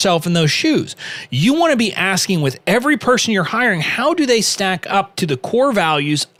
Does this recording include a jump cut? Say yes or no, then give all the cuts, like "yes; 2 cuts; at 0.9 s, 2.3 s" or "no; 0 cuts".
no; 0 cuts